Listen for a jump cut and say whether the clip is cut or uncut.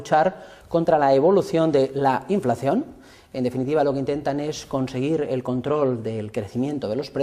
cut